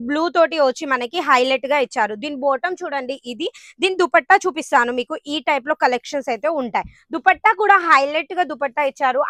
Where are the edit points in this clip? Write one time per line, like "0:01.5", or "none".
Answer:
none

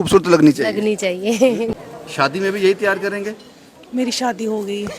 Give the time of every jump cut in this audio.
0:01.7

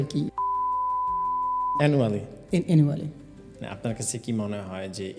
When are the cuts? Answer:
0:03.1

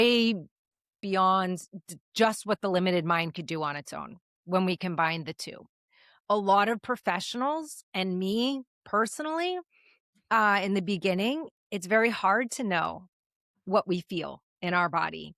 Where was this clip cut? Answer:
0:01.0

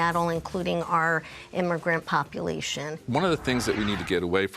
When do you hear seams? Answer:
0:03.0

